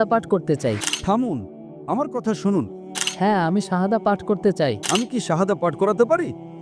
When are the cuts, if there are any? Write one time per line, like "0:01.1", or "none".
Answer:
0:00.9
0:02.8
0:04.8